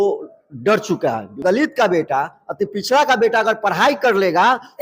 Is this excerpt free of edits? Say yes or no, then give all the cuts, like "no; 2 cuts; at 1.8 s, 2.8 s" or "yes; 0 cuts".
no; 1 cut; at 1.4 s